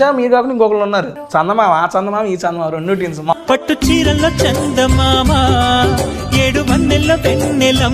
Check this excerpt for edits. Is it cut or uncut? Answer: cut